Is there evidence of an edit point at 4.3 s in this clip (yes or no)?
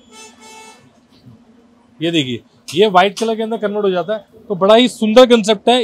no